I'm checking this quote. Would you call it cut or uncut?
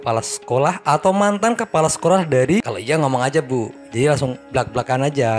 cut